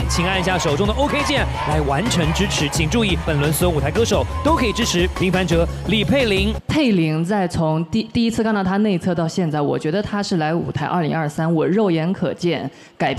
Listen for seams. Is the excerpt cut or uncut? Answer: cut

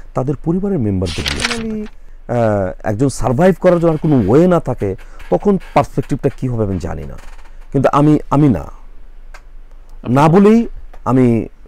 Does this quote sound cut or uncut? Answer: cut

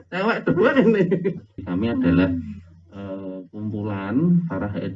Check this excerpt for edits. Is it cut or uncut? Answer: cut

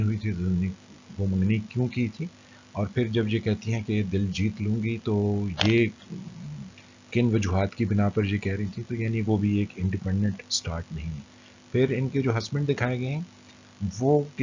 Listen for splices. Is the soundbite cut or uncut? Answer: cut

